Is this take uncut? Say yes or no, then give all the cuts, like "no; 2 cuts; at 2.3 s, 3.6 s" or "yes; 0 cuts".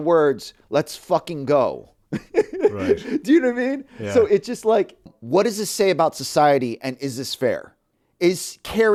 yes; 0 cuts